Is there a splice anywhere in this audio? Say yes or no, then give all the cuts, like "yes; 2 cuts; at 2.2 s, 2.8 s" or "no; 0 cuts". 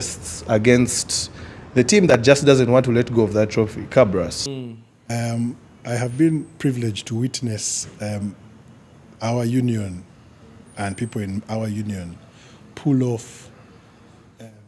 yes; 1 cut; at 4.4 s